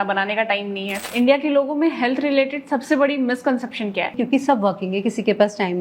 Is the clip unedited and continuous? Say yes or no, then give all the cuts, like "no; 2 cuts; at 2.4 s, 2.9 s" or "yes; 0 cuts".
no; 2 cuts; at 1.0 s, 4.2 s